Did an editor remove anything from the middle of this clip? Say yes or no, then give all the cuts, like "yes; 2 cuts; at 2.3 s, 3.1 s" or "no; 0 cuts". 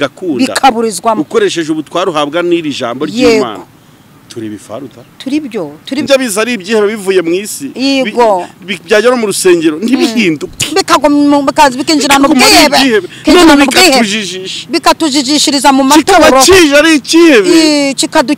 yes; 1 cut; at 6.1 s